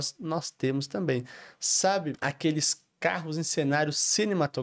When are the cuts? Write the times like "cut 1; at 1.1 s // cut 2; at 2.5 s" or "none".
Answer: cut 1; at 2.2 s